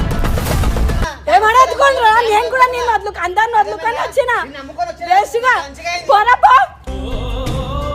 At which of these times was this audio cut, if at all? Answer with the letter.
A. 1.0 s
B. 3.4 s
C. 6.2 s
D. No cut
A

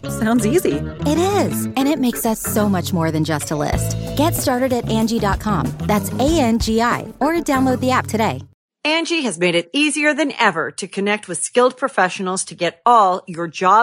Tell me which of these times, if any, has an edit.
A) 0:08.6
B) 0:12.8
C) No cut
A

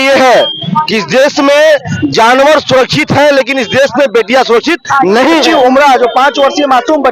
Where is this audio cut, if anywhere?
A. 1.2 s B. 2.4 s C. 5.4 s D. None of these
C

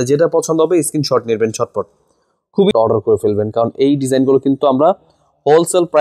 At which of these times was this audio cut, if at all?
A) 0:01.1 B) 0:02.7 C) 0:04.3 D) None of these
B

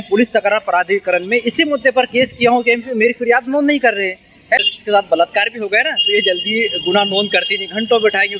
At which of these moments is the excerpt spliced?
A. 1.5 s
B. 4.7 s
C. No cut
B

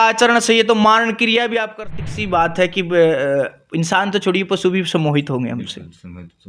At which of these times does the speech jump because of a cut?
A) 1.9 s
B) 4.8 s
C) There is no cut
A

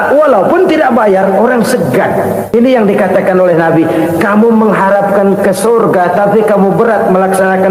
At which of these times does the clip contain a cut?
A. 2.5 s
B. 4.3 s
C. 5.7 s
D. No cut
A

